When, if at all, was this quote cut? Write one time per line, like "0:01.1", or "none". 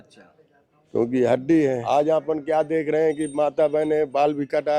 0:01.8